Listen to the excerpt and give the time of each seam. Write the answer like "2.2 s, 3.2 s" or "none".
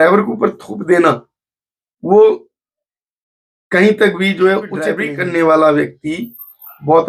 5.0 s